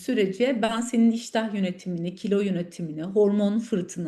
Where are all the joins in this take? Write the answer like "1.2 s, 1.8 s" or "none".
none